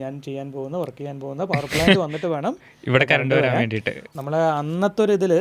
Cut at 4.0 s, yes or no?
yes